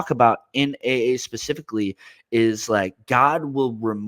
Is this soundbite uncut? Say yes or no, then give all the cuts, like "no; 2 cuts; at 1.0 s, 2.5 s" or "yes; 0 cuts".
yes; 0 cuts